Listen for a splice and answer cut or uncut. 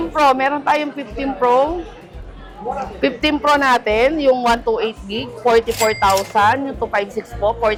uncut